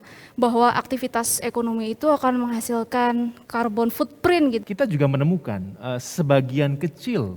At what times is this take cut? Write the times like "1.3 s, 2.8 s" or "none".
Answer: 3.4 s, 4.6 s

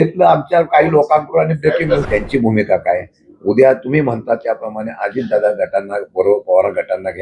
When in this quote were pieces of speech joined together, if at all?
2.1 s

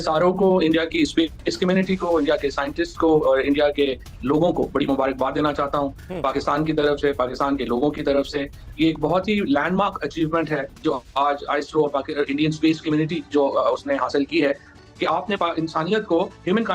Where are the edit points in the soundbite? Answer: none

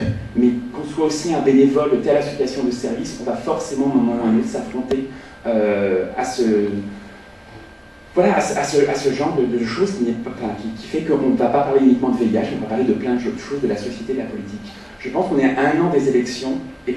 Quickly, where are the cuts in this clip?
15.8 s

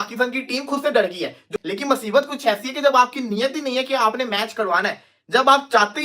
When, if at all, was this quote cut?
1.6 s

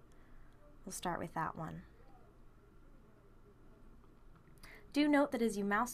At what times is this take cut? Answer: 1.4 s

